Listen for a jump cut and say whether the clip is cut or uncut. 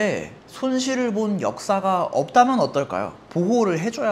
uncut